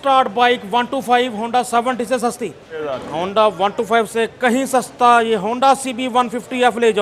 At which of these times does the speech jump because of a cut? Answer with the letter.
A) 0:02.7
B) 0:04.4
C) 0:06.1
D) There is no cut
A